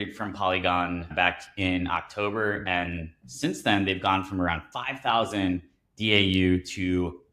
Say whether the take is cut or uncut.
cut